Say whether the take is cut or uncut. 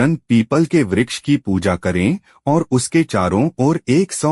uncut